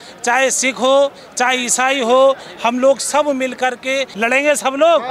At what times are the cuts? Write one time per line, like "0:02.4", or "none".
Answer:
0:04.1